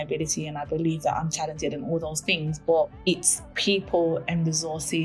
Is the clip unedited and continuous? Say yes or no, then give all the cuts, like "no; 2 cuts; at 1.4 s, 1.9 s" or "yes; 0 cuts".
no; 1 cut; at 3.0 s